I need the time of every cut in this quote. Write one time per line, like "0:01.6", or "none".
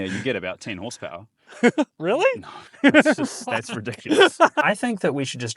0:04.6